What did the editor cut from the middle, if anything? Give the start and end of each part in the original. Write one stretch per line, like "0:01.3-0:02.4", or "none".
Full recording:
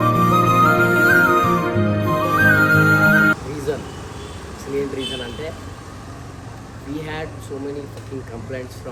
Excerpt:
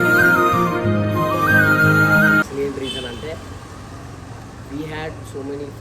0:03.4-0:04.6